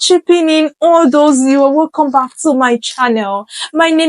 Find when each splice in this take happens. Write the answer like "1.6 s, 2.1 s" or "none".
none